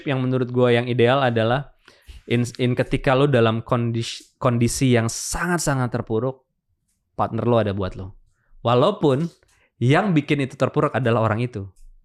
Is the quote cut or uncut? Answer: uncut